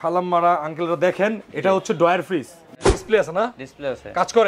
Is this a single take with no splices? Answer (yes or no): no